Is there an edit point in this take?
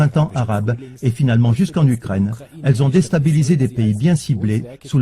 yes; 1 cut; at 2.0 s

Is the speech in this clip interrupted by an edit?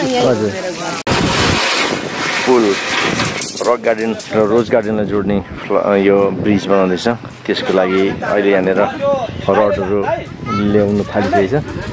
yes; 1 cut; at 1.0 s

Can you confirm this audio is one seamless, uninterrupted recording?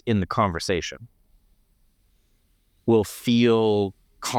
yes; 0 cuts

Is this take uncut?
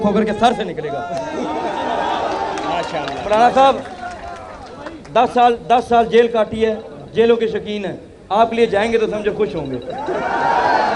yes; 0 cuts

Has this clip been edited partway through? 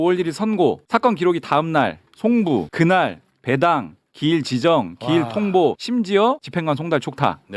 yes; 3 cuts; at 0.8 s, 2.7 s, 6.1 s

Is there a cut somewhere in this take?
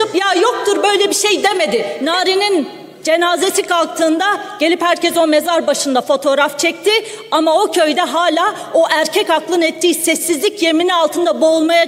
yes; 1 cut; at 1.9 s

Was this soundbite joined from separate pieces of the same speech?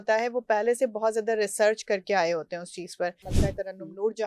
yes; 1 cut; at 3.3 s

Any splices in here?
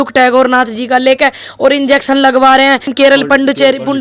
yes; 1 cut; at 2.9 s

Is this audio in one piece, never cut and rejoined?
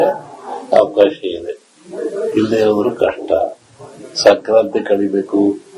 no; 1 cut; at 3.2 s

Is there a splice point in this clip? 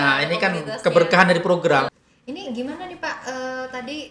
yes; 1 cut; at 1.9 s

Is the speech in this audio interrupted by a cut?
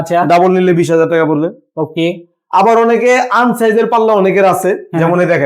no; 0 cuts

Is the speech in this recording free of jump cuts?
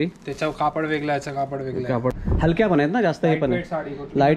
no; 1 cut; at 2.1 s

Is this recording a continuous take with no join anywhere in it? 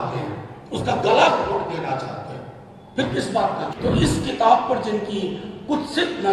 no; 1 cut; at 3.7 s

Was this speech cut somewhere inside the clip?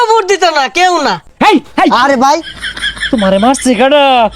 yes; 1 cut; at 1.2 s

